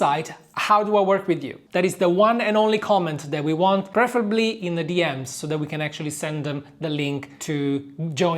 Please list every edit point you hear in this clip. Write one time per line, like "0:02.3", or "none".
0:01.6
0:03.9
0:07.3